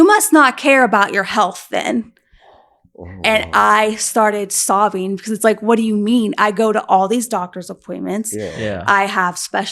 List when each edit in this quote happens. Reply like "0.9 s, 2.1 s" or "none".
none